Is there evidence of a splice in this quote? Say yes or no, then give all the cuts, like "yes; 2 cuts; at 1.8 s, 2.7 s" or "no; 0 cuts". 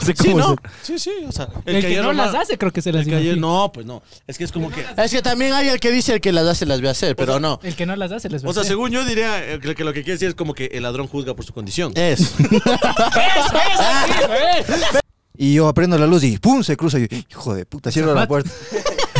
yes; 1 cut; at 15.0 s